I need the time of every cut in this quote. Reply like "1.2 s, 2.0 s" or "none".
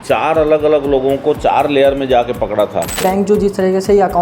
3.0 s

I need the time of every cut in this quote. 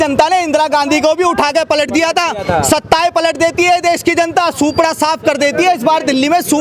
none

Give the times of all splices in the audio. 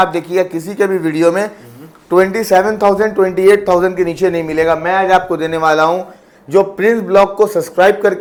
none

